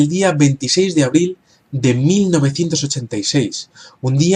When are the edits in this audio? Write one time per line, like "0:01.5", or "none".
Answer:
none